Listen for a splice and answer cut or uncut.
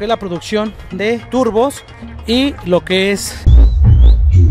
cut